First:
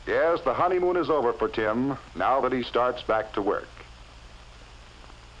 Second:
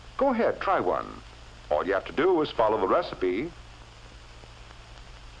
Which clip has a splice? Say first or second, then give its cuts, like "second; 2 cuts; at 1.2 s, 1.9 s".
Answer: second; 1 cut; at 3.0 s